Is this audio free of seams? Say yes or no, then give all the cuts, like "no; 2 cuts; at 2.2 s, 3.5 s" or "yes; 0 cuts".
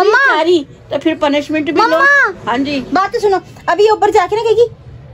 no; 1 cut; at 1.0 s